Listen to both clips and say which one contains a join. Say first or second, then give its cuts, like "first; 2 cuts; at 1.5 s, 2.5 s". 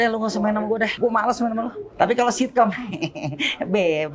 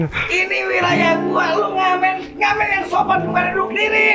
first; 2 cuts; at 0.9 s, 1.8 s